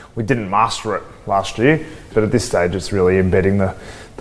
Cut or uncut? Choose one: cut